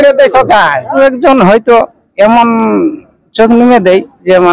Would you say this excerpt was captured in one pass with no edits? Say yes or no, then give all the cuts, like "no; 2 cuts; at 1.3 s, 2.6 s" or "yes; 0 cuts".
no; 1 cut; at 0.9 s